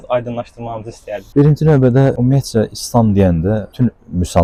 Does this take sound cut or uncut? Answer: uncut